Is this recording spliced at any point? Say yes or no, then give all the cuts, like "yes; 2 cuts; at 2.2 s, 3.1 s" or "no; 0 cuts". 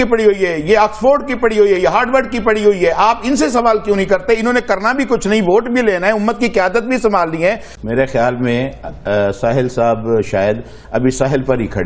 yes; 1 cut; at 7.7 s